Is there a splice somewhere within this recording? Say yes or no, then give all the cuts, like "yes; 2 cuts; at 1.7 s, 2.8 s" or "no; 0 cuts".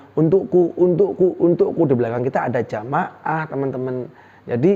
no; 0 cuts